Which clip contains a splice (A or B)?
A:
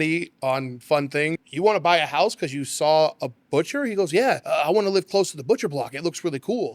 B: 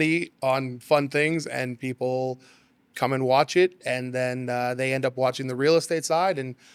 A